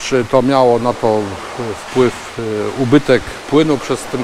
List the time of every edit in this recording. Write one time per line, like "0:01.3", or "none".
none